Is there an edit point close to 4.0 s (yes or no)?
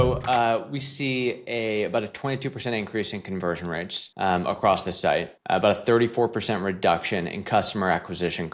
yes